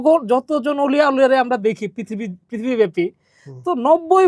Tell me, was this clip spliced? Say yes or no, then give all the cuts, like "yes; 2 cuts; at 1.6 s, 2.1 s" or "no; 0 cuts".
no; 0 cuts